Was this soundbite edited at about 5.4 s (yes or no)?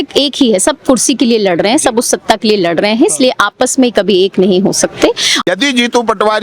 yes